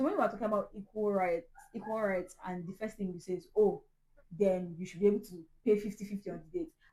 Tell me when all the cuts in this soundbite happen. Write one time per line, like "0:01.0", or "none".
none